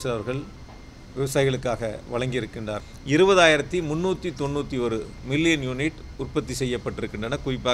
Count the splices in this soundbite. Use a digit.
1